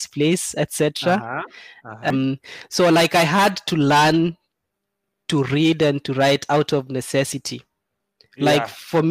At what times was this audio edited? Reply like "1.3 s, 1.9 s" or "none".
2.1 s